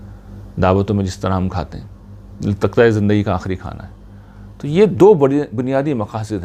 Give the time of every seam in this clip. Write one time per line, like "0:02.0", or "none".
none